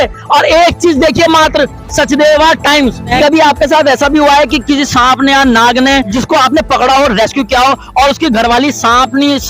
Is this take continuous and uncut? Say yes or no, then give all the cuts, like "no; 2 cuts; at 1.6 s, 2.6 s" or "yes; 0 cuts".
no; 2 cuts; at 3.2 s, 6.1 s